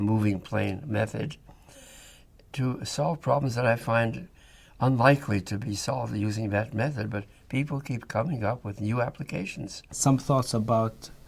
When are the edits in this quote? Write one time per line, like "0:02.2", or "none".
0:09.8